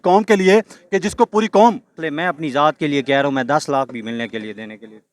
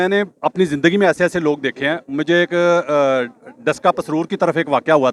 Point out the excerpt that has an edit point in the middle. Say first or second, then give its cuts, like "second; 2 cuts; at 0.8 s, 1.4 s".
first; 1 cut; at 2.0 s